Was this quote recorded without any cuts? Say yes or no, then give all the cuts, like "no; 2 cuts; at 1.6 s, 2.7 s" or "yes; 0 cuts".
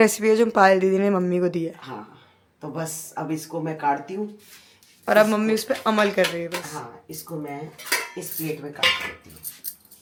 yes; 0 cuts